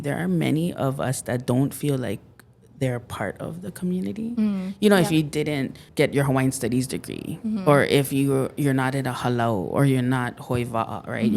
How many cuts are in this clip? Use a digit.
1